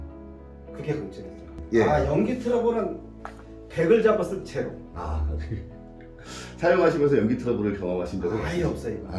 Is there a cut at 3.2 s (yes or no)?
no